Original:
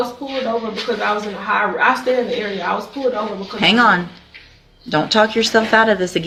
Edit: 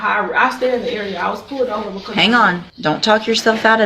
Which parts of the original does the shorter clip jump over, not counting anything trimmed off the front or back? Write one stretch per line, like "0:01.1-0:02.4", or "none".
0:04.1-0:04.8

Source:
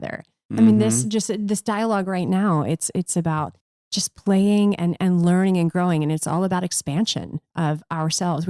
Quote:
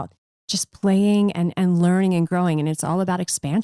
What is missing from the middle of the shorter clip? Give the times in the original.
none

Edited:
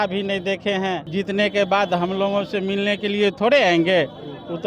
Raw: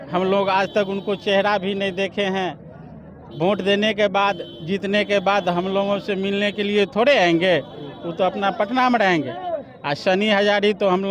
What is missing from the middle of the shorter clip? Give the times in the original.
0:02.6-0:04.6

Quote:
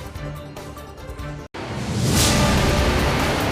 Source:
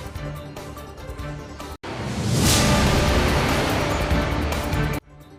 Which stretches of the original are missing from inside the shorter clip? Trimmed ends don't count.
0:01.5-0:01.8

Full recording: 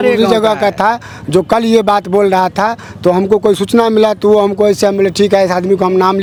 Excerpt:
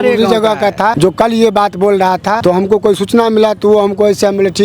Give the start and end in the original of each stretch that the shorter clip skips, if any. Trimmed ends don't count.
0:00.9-0:01.3
0:02.7-0:03.0

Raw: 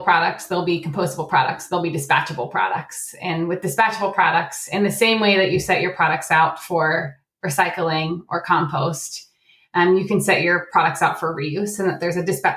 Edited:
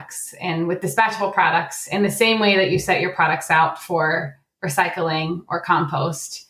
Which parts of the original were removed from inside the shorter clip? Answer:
none

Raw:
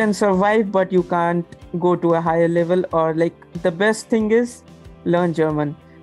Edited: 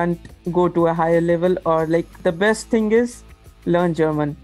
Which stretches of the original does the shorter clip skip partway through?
0:03.4-0:03.5

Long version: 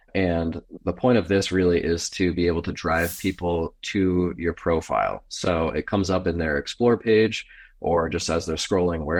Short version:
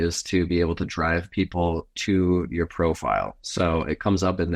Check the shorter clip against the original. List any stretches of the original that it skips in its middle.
none

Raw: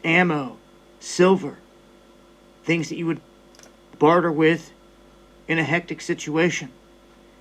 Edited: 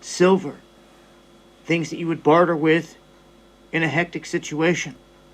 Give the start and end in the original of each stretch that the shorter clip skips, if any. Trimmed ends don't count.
0:03.2-0:03.9

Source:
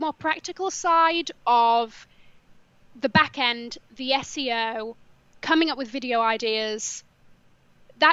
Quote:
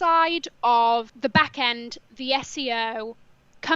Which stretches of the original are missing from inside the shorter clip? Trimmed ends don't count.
0:01.9-0:02.9

